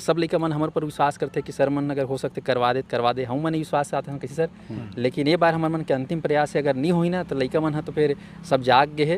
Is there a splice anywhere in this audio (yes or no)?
no